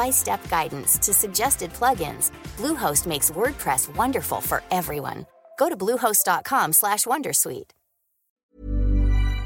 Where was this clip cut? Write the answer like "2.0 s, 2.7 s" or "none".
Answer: 8.4 s